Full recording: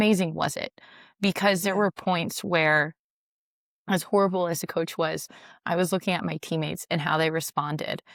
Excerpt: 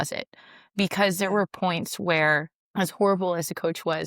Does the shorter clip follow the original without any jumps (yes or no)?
no